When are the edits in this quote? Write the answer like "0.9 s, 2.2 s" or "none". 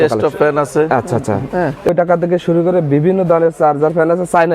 1.9 s

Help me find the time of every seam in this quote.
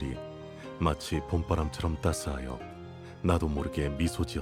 none

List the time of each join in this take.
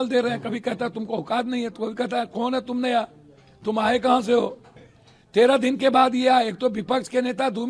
none

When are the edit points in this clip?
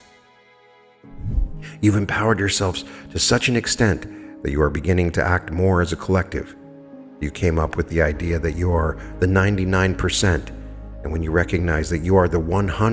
1.3 s

